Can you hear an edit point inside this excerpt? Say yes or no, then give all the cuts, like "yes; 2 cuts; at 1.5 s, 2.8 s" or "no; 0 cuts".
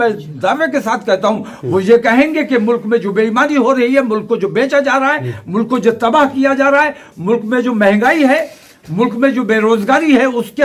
no; 0 cuts